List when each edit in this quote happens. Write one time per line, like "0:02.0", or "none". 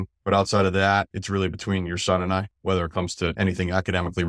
none